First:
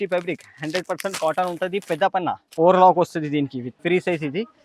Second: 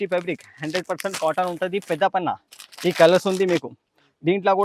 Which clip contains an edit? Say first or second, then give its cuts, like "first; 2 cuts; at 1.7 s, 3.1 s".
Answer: first; 2 cuts; at 2.4 s, 3.7 s